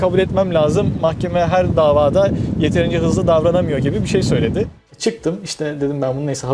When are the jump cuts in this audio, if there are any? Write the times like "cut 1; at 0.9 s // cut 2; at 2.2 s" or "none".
cut 1; at 4.8 s